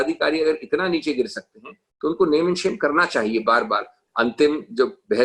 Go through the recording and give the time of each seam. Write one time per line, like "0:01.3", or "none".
0:04.0